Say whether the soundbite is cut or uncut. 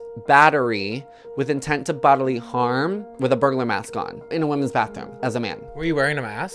uncut